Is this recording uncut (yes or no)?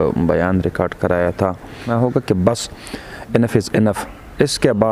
no